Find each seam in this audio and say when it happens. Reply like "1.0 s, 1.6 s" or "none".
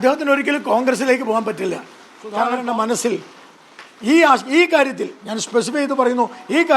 2.6 s